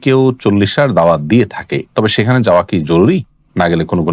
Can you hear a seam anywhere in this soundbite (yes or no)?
no